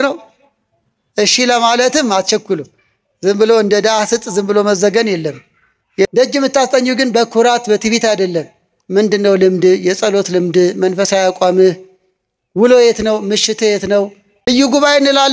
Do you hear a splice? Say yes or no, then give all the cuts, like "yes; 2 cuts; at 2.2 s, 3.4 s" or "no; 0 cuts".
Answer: yes; 2 cuts; at 6.1 s, 14.5 s